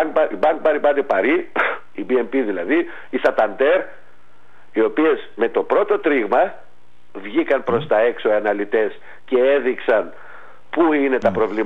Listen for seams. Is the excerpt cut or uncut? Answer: uncut